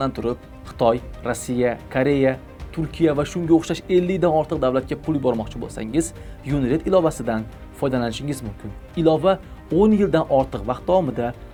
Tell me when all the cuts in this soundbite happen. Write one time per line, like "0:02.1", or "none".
none

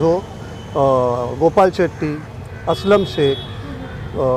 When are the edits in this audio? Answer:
none

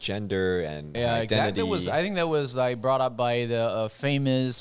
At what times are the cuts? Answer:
none

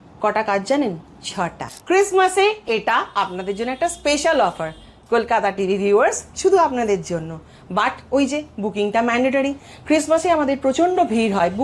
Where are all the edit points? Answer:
0:01.7

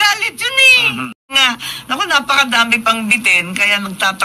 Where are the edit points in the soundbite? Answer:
0:01.3

